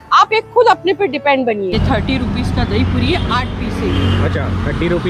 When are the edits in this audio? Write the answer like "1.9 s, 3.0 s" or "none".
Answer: 1.8 s

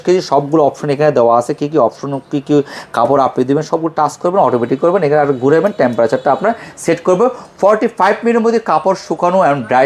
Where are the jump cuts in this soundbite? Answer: none

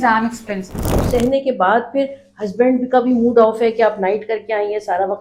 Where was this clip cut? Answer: 1.0 s

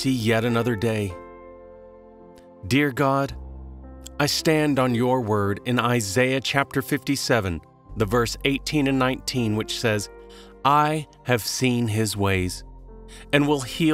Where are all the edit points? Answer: 1.1 s, 2.6 s

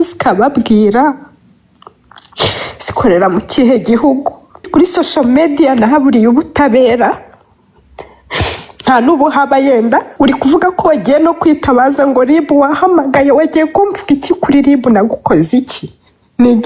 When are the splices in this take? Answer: 4.6 s, 10.1 s

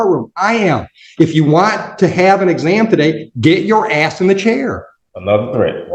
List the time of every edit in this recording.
4.9 s

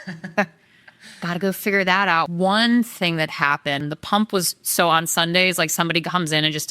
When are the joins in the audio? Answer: 2.3 s, 3.8 s

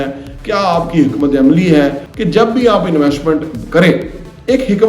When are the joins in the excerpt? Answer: 2.1 s

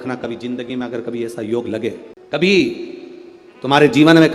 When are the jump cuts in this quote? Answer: 2.1 s

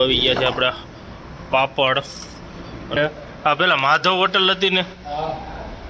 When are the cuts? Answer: 3.0 s

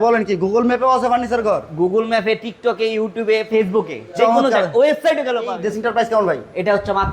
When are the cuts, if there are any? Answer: 5.6 s

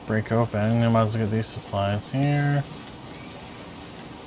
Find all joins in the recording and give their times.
2.6 s

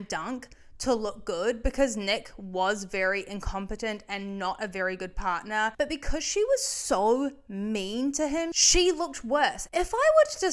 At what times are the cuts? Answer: 5.7 s, 8.6 s, 9.6 s

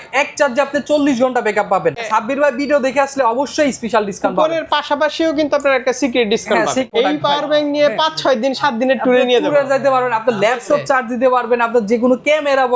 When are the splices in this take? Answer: 2.0 s, 6.9 s

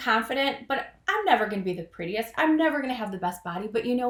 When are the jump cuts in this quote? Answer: none

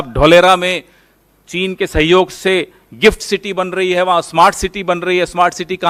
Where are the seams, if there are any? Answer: none

